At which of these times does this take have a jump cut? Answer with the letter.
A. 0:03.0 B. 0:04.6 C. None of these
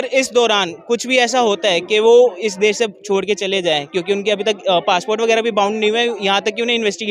C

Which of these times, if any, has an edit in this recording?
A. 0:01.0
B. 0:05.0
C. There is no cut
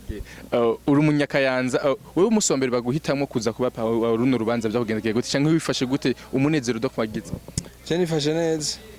C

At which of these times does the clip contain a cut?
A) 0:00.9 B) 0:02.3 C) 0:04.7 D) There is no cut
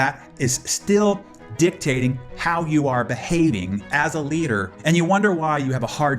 C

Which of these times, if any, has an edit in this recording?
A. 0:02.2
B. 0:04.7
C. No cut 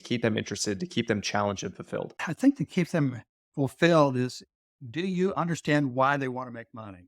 A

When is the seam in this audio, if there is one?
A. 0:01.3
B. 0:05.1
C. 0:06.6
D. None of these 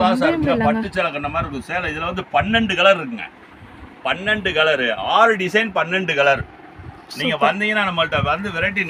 D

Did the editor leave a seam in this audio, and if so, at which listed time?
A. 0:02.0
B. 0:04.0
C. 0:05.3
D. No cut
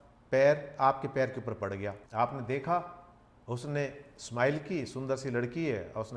A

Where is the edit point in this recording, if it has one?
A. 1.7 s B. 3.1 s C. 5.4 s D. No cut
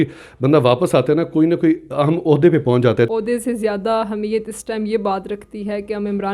B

